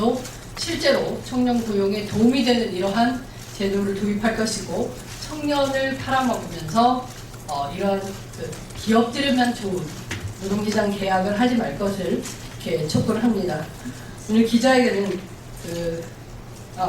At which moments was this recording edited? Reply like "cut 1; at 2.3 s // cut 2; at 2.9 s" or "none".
cut 1; at 7.5 s